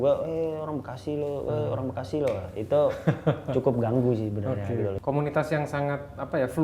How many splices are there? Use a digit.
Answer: 1